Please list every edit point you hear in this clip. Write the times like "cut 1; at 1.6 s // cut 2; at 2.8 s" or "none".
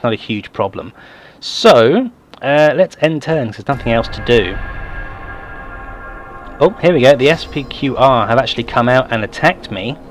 cut 1; at 8.3 s

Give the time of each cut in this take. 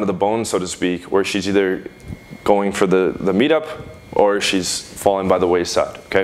none

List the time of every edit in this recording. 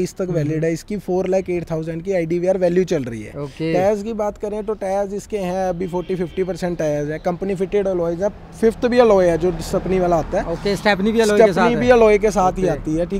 none

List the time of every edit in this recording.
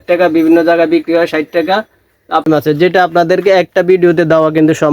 cut 1; at 2.4 s

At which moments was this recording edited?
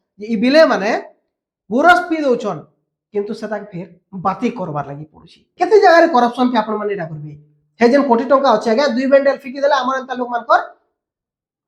cut 1; at 5.5 s

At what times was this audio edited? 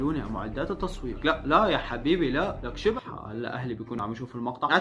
cut 1; at 2.9 s

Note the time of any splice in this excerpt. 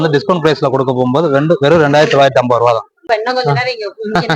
cut 1; at 3.0 s

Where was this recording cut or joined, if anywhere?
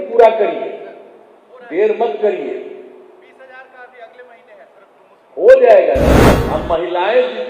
cut 1; at 6.3 s

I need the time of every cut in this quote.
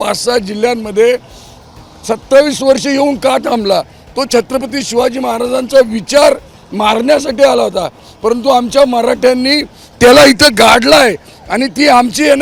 none

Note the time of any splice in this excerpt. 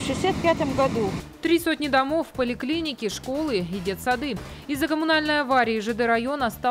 cut 1; at 1.3 s

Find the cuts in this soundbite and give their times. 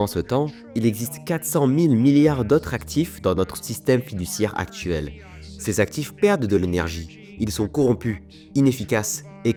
none

